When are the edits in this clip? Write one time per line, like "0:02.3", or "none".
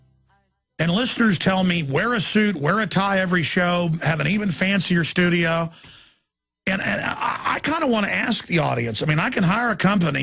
0:04.3